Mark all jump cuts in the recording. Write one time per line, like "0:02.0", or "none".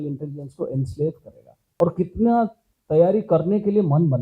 0:01.6